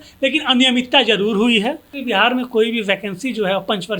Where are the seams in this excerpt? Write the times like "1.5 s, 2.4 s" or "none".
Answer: 1.9 s